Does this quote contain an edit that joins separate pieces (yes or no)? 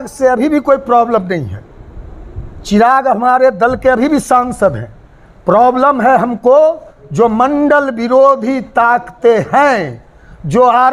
no